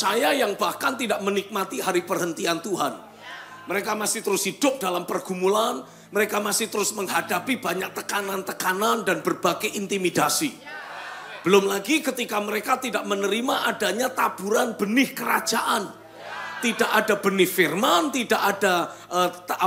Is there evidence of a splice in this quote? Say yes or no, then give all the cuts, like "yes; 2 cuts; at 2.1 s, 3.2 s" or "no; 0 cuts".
no; 0 cuts